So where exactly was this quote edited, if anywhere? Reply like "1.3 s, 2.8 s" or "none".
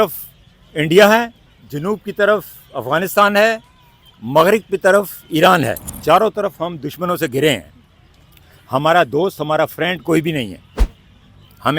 1.4 s, 5.9 s

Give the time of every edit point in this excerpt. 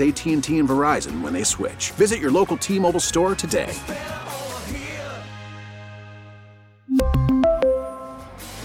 none

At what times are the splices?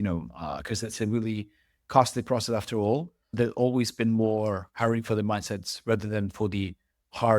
3.3 s

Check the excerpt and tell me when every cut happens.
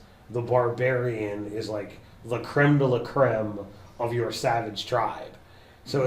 4.4 s

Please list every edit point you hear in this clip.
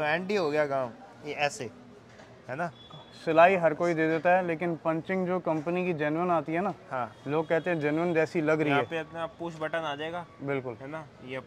none

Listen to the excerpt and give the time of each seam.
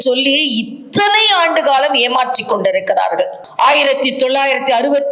3.4 s

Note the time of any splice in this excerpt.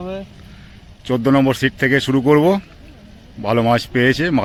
none

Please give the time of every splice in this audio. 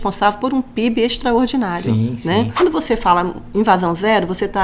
2.5 s

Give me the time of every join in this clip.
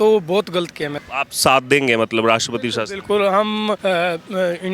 1.0 s, 3.8 s

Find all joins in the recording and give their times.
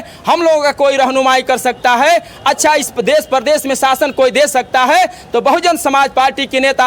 none

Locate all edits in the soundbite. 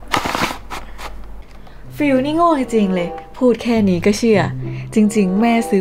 1.8 s

